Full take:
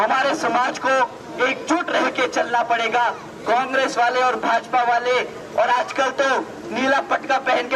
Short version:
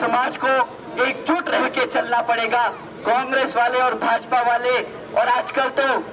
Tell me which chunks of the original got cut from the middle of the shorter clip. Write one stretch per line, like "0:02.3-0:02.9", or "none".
none